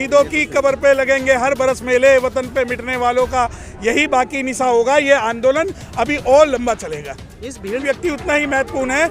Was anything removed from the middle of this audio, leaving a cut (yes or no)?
yes